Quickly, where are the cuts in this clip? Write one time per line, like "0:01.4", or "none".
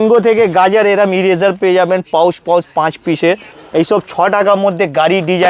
0:03.5